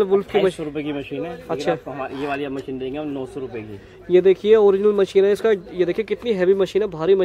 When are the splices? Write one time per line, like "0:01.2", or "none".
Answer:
none